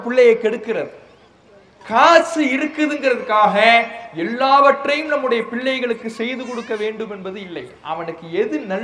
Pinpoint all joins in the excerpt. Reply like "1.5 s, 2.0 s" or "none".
none